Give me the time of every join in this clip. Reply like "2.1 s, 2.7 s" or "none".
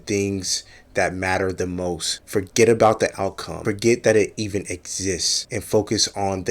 5.4 s